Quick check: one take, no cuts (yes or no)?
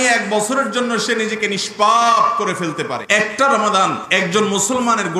no